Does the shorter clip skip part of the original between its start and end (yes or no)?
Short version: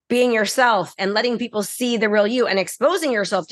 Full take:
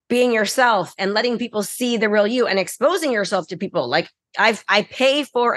no